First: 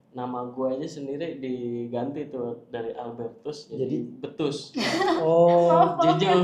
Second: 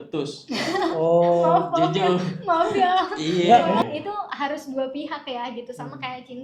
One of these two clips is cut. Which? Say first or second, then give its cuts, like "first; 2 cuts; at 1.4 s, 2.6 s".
second; 1 cut; at 3.8 s